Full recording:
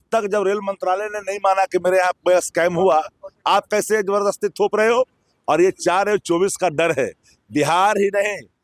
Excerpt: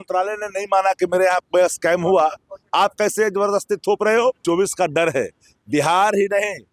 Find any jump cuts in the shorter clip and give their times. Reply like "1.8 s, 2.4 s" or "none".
4.4 s